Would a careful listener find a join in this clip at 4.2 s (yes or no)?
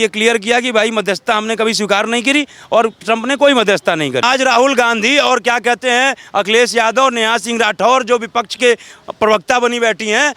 yes